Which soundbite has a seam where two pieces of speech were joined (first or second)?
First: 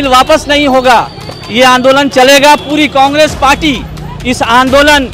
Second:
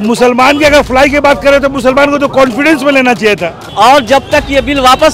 second